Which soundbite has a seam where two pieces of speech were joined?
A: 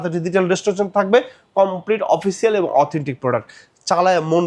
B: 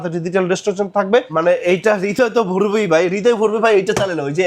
B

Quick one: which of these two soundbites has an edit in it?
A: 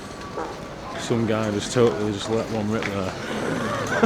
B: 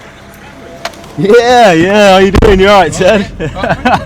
A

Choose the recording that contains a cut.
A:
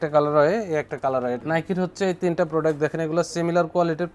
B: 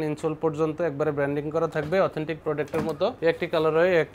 A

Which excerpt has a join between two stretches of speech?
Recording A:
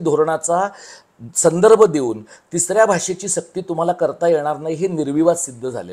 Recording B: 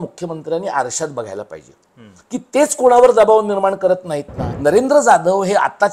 B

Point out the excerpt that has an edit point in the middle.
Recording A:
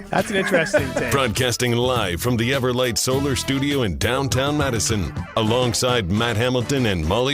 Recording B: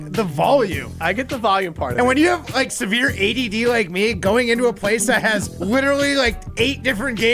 A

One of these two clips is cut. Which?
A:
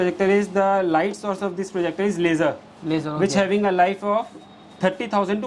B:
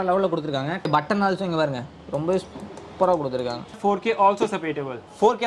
B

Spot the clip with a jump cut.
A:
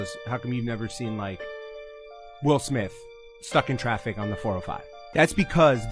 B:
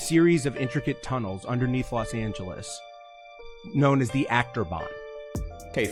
A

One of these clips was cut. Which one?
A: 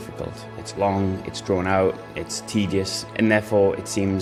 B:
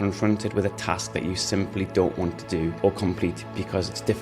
B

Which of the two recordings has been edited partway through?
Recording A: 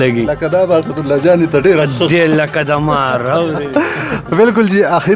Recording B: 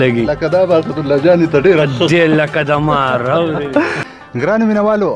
B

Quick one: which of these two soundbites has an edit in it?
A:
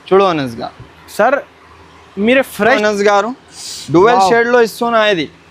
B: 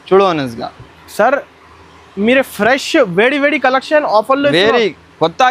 A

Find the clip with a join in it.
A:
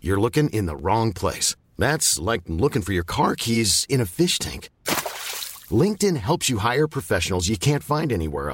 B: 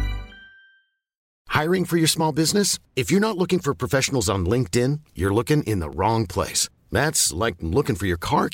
B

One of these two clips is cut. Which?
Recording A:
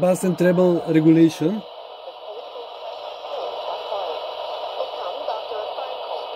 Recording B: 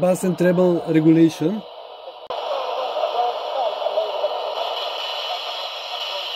B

